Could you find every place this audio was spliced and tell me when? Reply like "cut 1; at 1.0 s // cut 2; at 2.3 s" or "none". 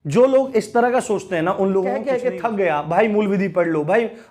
cut 1; at 2.0 s